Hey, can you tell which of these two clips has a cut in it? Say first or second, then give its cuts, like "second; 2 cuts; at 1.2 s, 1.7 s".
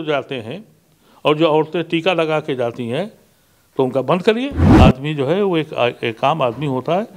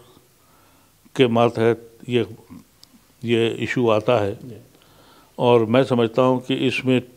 first; 1 cut; at 4.6 s